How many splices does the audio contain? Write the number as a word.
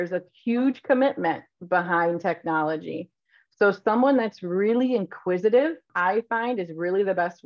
one